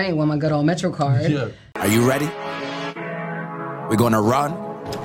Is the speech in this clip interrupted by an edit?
yes; 1 cut; at 1.6 s

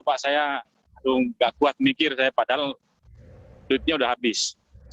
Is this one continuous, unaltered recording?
yes; 0 cuts

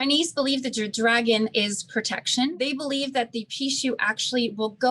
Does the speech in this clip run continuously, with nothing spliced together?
no; 1 cut; at 2.6 s

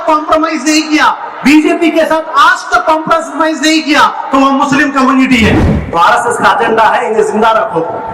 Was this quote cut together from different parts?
yes; 1 cut; at 5.7 s

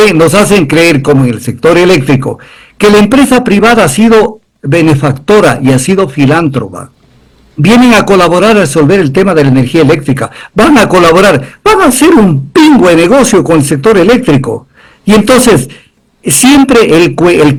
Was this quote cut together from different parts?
no; 0 cuts

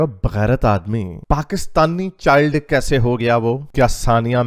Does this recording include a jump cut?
no; 0 cuts

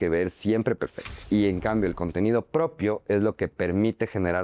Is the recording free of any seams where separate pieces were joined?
no; 1 cut; at 1.1 s

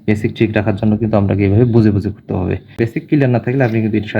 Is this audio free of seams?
no; 1 cut; at 2.8 s

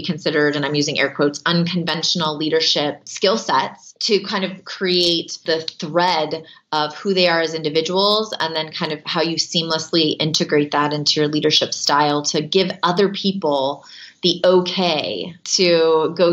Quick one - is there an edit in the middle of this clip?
yes; 4 cuts; at 3.1 s, 3.9 s, 5.4 s, 15.4 s

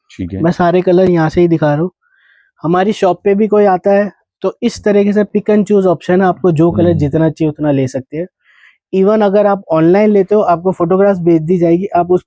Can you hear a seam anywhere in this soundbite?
no; 0 cuts

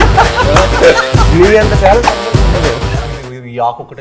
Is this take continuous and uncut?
no; 1 cut; at 3.0 s

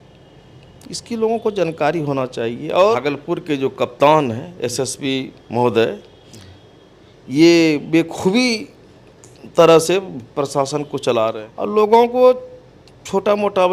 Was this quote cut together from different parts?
yes; 2 cuts; at 3.0 s, 11.3 s

